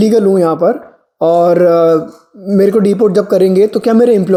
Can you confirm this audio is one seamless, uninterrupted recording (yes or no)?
yes